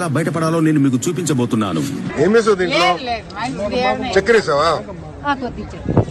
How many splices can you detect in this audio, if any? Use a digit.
1